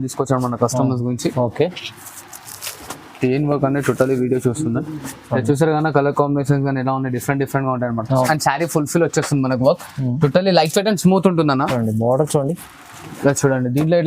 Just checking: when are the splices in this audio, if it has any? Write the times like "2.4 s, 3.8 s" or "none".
8.3 s

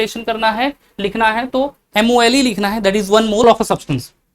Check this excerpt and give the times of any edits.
3.4 s

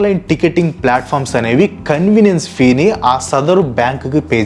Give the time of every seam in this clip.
none

